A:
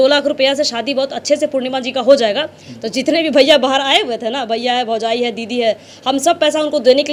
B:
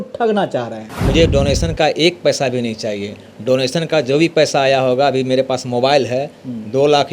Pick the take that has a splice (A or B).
B